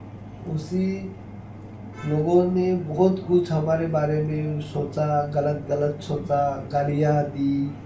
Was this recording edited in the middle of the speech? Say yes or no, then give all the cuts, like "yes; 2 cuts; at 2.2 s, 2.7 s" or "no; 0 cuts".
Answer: no; 0 cuts